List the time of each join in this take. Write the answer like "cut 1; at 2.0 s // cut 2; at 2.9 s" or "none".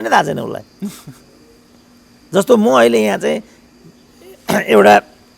none